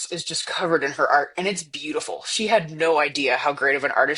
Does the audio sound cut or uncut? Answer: uncut